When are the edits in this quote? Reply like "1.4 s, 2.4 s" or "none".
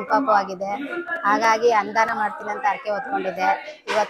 none